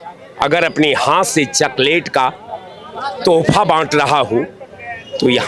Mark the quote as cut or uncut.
uncut